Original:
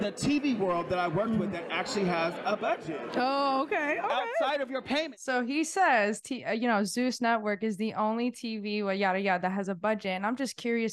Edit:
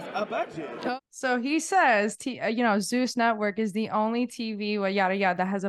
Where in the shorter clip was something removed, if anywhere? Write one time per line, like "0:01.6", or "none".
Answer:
0:01.0